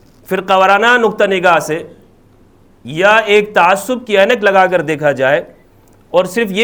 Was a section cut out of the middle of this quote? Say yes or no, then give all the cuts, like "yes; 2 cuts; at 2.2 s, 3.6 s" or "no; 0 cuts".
no; 0 cuts